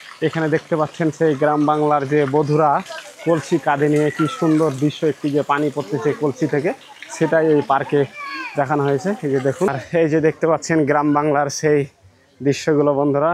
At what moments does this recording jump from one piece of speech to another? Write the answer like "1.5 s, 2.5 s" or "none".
9.7 s